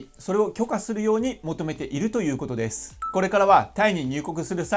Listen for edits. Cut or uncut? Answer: cut